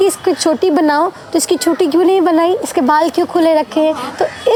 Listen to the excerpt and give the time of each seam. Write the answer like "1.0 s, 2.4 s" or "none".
none